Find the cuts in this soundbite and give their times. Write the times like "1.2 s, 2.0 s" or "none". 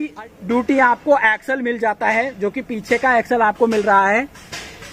none